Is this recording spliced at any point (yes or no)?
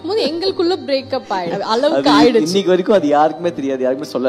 yes